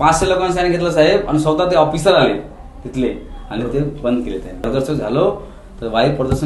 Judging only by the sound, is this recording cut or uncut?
cut